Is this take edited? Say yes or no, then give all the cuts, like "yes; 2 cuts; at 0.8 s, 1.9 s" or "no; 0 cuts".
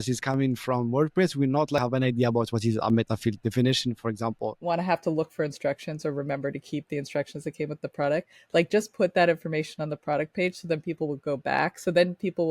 yes; 2 cuts; at 1.8 s, 4.6 s